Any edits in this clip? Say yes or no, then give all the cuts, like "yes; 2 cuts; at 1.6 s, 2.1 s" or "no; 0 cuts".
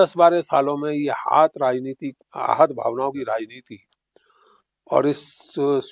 no; 0 cuts